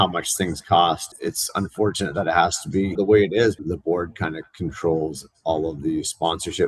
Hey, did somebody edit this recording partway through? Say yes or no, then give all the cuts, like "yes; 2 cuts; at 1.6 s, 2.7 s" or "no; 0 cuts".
yes; 3 cuts; at 1.0 s, 2.9 s, 3.6 s